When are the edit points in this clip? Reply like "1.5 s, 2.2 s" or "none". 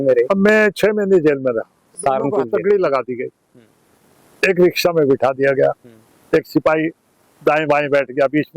2.1 s